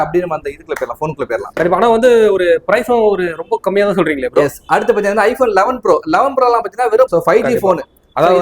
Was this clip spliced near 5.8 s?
no; 2 cuts; at 1.4 s, 7.1 s

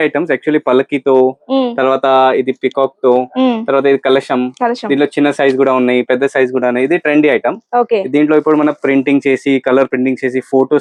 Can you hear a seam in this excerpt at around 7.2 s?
no; 0 cuts

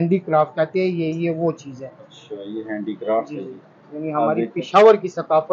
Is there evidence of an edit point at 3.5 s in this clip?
no; 0 cuts

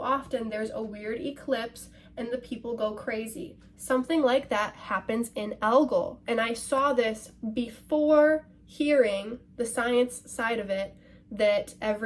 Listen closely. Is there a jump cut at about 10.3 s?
no; 0 cuts

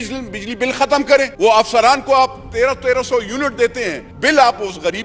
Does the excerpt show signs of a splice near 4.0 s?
yes; 2 cuts; at 1.3 s, 4.0 s

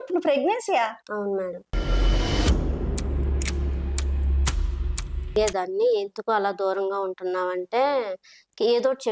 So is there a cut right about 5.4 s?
yes; 1 cut; at 5.4 s

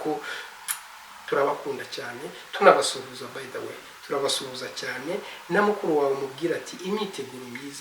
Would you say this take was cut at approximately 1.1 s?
yes; 1 cut; at 1.1 s

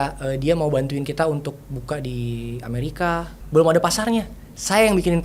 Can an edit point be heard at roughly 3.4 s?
yes; 1 cut; at 3.4 s

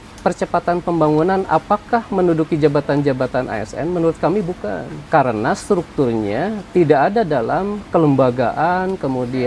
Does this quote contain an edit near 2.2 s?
no; 2 cuts; at 4.9 s, 7.8 s

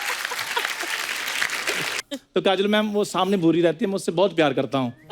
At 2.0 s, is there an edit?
yes; 1 cut; at 2.0 s

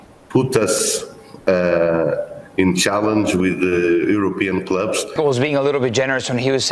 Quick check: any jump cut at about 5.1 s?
yes; 1 cut; at 5.1 s

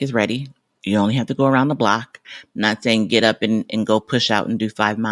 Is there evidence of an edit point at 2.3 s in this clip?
yes; 1 cut; at 2.3 s

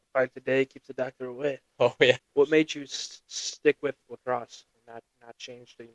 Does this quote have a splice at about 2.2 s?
yes; 1 cut; at 2.2 s

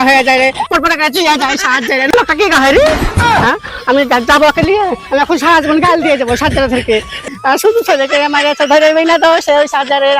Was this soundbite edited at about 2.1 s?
yes; 2 cuts; at 2.1 s, 7.2 s

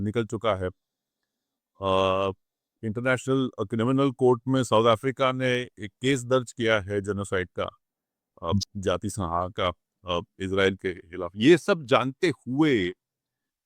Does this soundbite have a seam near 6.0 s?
no; 0 cuts

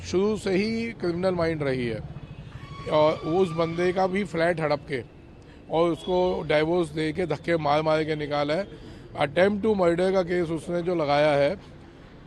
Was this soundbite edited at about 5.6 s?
no; 0 cuts

